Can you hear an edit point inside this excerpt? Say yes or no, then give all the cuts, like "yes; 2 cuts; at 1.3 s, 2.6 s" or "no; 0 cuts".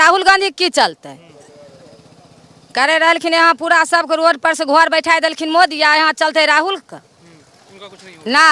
no; 0 cuts